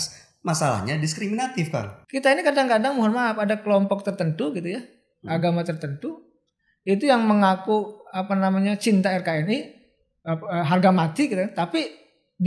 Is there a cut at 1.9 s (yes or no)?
yes